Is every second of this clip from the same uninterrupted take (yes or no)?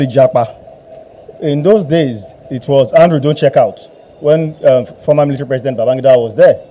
yes